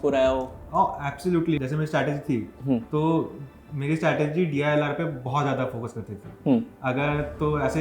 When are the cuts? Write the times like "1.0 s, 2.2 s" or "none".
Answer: 1.6 s